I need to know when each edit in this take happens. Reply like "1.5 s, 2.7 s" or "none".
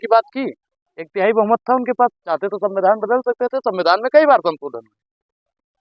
none